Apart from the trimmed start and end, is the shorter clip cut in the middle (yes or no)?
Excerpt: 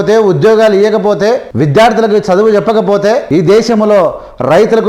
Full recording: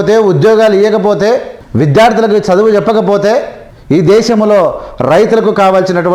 yes